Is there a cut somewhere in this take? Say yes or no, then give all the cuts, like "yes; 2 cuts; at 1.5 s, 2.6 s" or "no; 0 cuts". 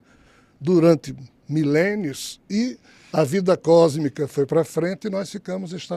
no; 0 cuts